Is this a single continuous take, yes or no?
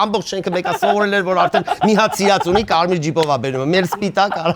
yes